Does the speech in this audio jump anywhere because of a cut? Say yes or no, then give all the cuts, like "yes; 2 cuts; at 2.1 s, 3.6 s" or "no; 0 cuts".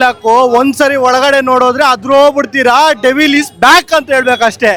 no; 0 cuts